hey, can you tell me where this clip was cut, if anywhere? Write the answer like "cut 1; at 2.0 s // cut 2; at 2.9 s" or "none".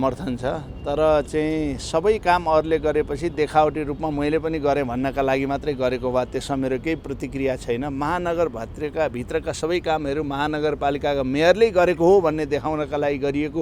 none